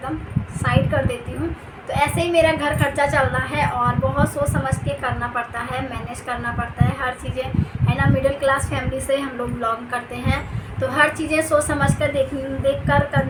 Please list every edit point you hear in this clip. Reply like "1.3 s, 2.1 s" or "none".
none